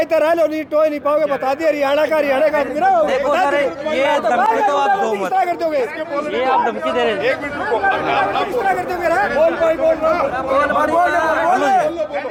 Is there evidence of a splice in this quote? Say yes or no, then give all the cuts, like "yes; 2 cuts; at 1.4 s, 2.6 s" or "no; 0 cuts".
no; 0 cuts